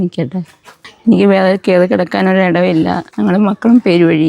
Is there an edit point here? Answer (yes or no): yes